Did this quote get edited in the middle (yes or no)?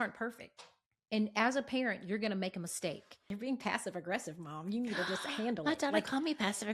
yes